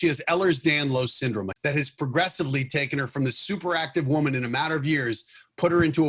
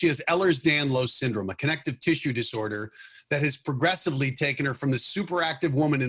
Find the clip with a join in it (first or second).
first